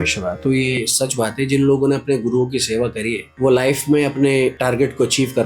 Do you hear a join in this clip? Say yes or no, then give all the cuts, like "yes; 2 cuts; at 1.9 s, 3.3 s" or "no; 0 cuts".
yes; 2 cuts; at 3.2 s, 4.6 s